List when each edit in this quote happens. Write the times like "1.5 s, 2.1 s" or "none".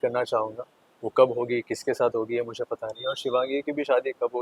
none